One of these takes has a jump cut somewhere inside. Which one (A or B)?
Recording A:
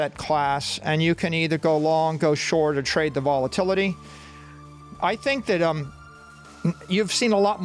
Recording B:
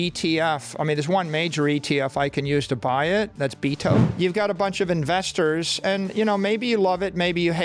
B